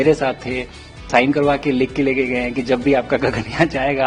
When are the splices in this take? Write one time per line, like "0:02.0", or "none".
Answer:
0:01.1